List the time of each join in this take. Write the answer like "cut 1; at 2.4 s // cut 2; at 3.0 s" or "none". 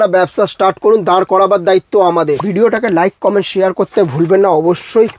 cut 1; at 2.4 s